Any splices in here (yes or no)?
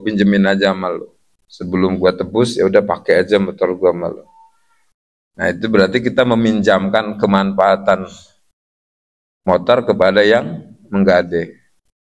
no